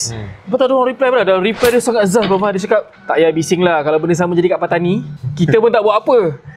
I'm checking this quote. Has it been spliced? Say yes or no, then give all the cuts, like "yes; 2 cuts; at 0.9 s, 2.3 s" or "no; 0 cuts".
yes; 2 cuts; at 3.0 s, 5.2 s